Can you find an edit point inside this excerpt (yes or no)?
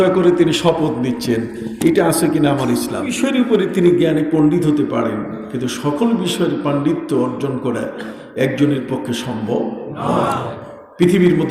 yes